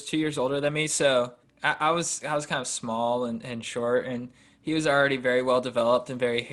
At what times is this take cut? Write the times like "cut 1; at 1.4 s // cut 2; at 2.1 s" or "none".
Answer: cut 1; at 1.5 s